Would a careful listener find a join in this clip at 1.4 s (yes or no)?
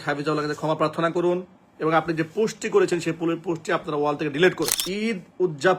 no